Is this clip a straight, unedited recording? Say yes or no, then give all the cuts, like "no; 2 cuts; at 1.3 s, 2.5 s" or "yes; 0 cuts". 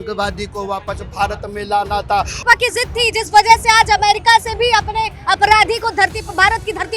no; 1 cut; at 2.4 s